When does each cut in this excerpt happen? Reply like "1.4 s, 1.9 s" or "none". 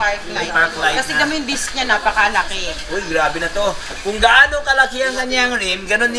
none